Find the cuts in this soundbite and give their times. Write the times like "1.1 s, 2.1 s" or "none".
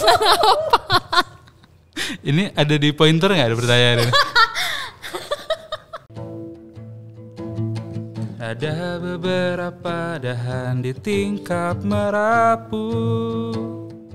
6.1 s